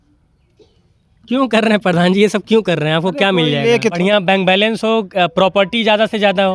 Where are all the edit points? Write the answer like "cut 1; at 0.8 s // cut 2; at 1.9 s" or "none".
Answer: cut 1; at 4.0 s